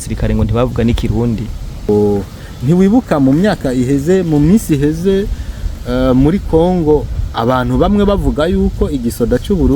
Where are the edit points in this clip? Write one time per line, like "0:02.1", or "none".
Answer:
0:01.9